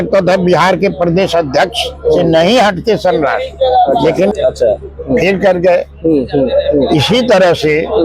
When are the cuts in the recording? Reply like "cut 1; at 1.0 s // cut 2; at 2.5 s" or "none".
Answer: cut 1; at 4.3 s